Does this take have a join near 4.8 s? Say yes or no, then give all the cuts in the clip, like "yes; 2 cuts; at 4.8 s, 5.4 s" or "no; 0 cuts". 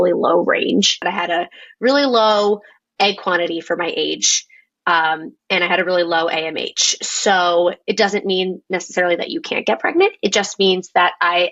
no; 1 cut; at 1.0 s